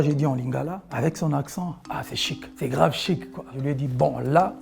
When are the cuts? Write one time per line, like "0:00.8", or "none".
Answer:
0:03.5